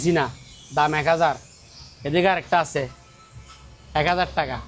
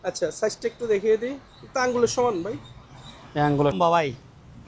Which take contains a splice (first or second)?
second